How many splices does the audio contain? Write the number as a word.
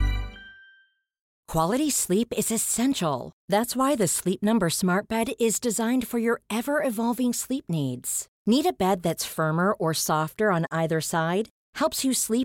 one